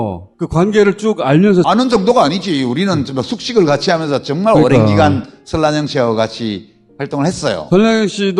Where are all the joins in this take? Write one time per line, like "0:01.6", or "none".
none